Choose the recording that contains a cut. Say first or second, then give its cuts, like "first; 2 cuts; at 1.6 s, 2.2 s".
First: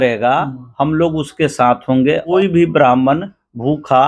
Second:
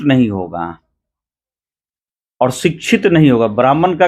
first; 1 cut; at 2.3 s